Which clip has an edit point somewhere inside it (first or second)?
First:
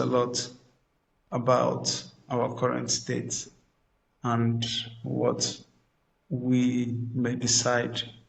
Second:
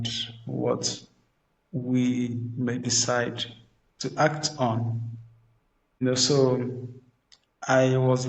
second